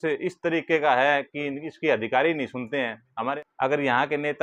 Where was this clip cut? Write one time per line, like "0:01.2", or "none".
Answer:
0:03.3